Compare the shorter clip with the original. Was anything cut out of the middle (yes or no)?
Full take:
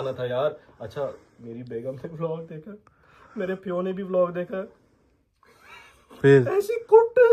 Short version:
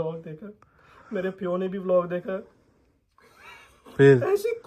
no